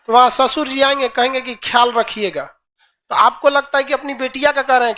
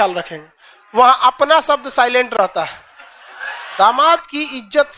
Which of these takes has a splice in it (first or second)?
second